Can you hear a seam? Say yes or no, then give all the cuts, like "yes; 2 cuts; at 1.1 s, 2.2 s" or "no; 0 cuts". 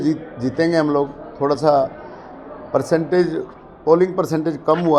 no; 0 cuts